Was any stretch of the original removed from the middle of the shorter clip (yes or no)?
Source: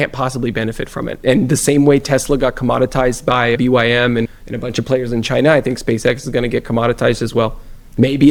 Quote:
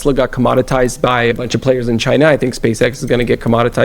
yes